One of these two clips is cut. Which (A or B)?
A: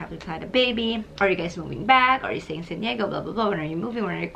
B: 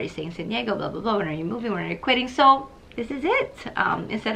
A